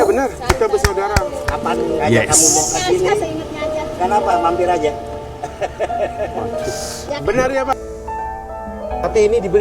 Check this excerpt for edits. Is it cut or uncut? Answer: cut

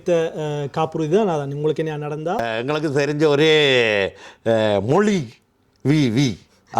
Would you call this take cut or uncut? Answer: cut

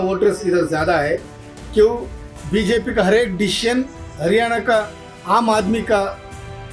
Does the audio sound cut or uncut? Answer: uncut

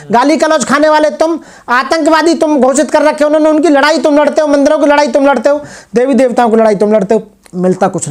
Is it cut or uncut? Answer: uncut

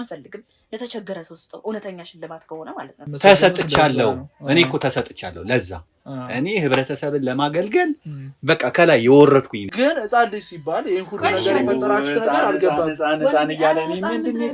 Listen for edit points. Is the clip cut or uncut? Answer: cut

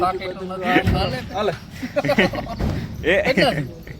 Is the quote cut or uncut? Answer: cut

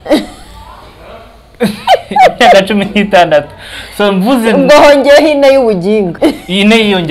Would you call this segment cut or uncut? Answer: cut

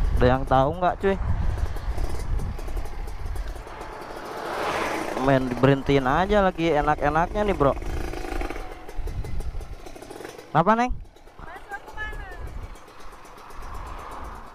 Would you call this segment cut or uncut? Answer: cut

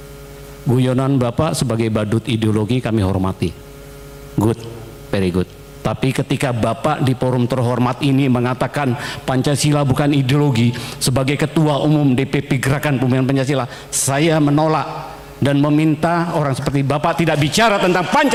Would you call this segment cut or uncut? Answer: uncut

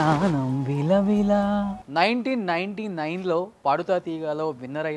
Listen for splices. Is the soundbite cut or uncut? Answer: cut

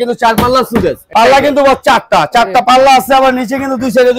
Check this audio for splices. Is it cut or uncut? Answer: cut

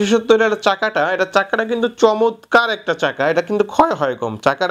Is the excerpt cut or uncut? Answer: uncut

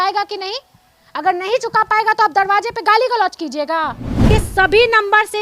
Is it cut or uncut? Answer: cut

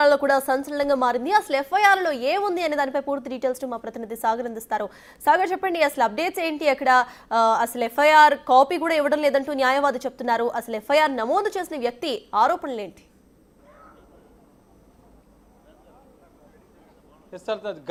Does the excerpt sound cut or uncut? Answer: uncut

